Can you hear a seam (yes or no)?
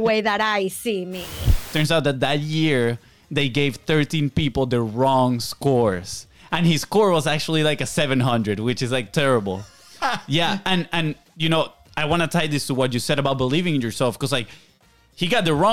yes